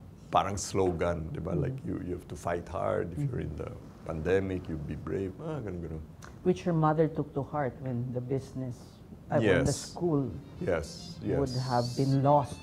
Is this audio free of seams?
yes; 0 cuts

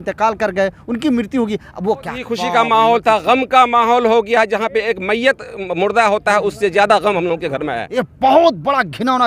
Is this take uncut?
no; 2 cuts; at 2.2 s, 7.8 s

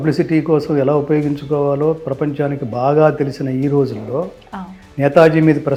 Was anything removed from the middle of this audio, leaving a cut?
no; 0 cuts

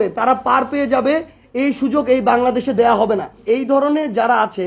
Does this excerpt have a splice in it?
yes; 1 cut; at 3.3 s

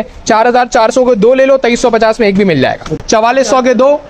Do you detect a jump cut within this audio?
yes; 1 cut; at 3.0 s

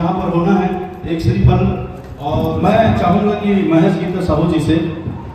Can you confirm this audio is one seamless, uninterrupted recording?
no; 1 cut; at 2.5 s

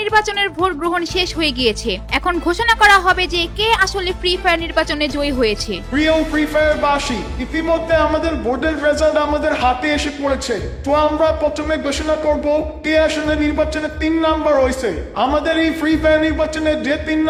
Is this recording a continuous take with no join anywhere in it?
yes; 0 cuts

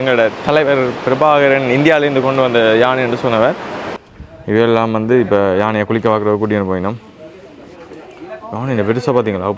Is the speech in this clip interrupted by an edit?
yes; 1 cut; at 4.0 s

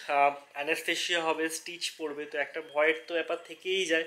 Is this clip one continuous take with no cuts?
yes; 0 cuts

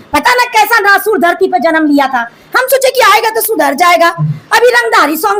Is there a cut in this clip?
no; 0 cuts

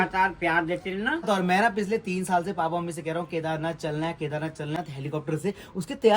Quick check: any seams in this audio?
yes; 2 cuts; at 1.2 s, 4.8 s

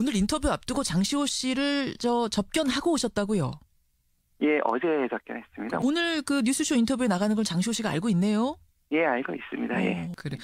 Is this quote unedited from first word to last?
no; 1 cut; at 6.8 s

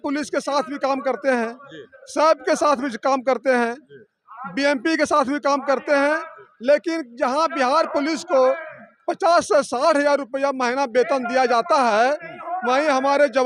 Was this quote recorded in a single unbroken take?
yes; 0 cuts

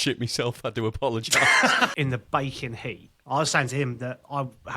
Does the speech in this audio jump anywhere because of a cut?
yes; 1 cut; at 1.9 s

